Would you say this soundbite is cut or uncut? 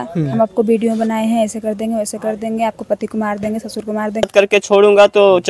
cut